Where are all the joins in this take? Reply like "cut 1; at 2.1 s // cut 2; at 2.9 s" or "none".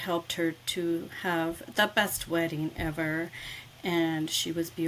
none